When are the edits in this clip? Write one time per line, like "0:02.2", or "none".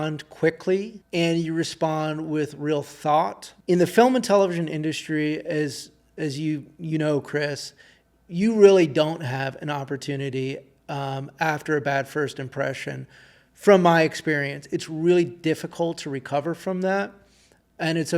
0:01.0
0:03.5